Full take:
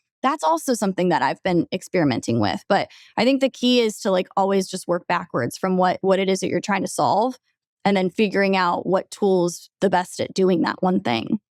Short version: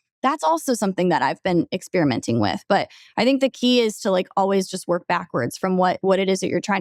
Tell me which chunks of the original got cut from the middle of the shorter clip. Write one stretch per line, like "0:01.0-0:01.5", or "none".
none